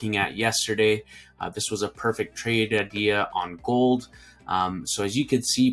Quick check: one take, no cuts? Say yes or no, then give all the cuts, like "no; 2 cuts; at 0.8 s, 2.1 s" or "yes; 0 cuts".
yes; 0 cuts